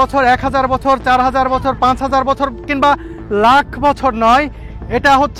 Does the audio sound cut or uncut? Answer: uncut